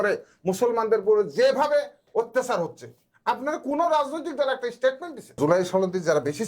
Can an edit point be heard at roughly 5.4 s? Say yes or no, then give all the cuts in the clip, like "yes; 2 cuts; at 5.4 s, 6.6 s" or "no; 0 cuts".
yes; 1 cut; at 5.4 s